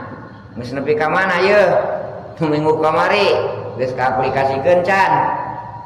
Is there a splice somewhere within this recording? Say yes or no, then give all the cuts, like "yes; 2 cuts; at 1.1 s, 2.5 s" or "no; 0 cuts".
no; 0 cuts